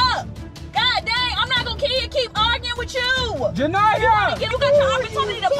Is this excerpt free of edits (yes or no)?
no